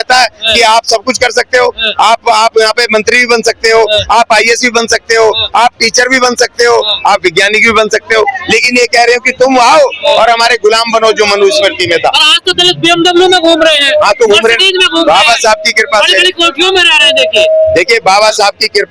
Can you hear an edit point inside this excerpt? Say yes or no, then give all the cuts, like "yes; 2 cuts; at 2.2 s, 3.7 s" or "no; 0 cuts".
no; 0 cuts